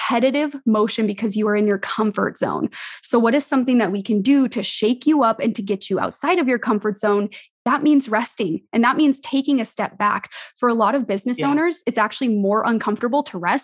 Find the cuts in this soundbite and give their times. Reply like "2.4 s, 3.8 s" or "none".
7.6 s